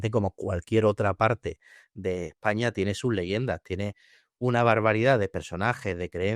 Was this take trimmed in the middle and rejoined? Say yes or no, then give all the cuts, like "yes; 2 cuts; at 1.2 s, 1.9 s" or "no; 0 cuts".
no; 0 cuts